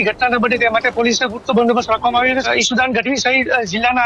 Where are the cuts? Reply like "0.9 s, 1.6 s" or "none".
2.5 s